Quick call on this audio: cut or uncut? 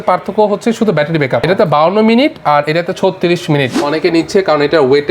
cut